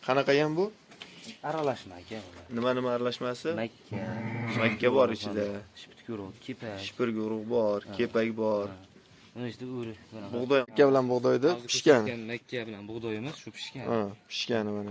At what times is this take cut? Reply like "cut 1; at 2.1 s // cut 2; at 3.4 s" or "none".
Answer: cut 1; at 10.7 s

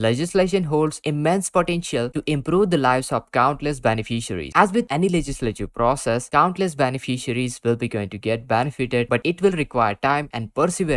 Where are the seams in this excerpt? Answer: cut 1; at 2.1 s

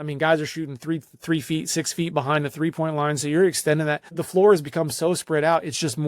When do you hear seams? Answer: cut 1; at 4.2 s

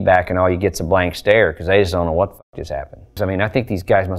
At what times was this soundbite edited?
cut 1; at 3.1 s

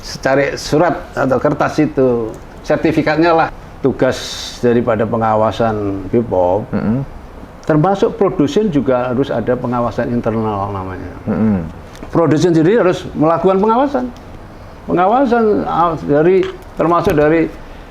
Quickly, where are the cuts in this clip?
cut 1; at 3.6 s

